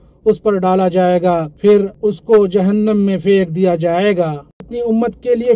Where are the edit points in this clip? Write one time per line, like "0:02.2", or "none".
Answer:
0:04.5